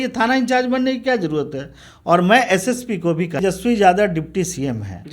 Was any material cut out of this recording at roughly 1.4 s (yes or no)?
no